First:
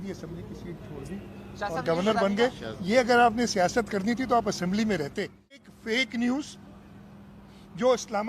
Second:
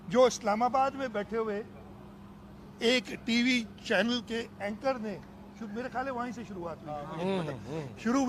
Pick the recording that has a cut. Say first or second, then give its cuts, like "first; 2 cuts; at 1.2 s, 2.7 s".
first; 1 cut; at 5.7 s